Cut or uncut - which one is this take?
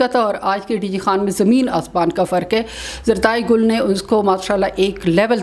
uncut